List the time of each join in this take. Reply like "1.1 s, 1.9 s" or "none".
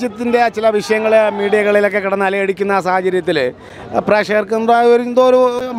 none